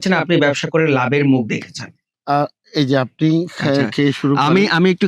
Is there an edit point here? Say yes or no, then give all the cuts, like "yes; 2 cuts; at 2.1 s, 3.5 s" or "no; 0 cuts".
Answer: yes; 1 cut; at 2.2 s